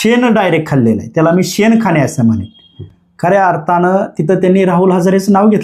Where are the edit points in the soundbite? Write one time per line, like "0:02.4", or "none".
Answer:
none